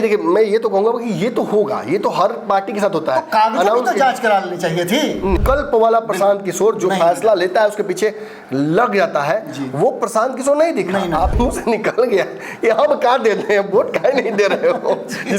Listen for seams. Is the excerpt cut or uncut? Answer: cut